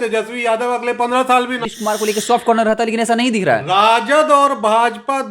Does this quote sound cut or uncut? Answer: cut